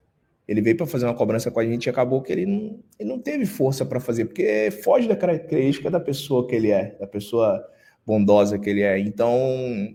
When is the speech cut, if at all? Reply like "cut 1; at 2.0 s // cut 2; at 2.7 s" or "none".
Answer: none